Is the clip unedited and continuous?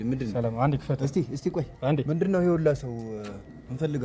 yes; 0 cuts

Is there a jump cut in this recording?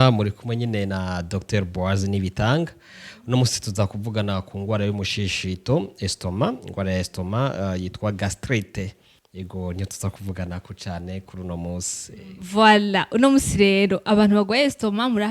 no; 0 cuts

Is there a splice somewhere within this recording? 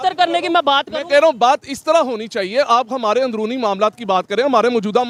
no; 0 cuts

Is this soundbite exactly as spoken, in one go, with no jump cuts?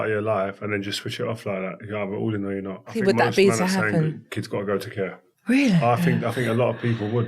no; 3 cuts; at 2.9 s, 5.3 s, 6.3 s

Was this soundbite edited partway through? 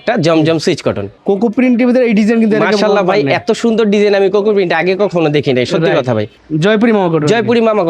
yes; 2 cuts; at 1.2 s, 6.4 s

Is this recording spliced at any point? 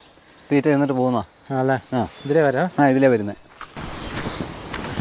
yes; 1 cut; at 3.8 s

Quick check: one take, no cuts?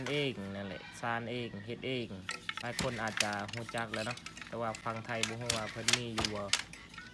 no; 1 cut; at 2.4 s

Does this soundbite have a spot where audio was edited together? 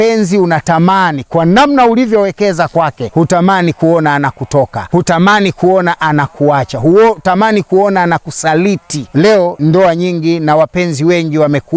yes; 3 cuts; at 3.0 s, 4.8 s, 9.4 s

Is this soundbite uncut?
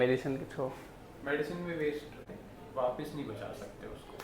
no; 1 cut; at 2.2 s

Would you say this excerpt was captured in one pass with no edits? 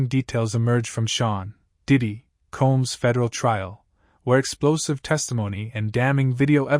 yes; 0 cuts

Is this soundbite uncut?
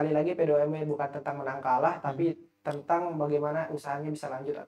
yes; 0 cuts

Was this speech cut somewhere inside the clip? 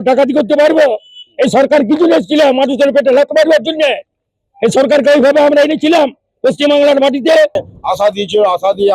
yes; 1 cut; at 7.7 s

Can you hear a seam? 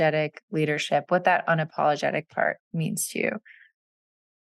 no; 0 cuts

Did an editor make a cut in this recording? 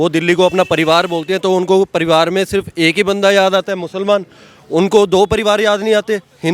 no; 0 cuts

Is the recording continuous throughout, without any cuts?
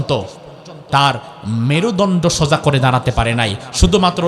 yes; 0 cuts

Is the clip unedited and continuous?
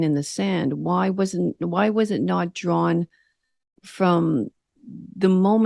yes; 0 cuts

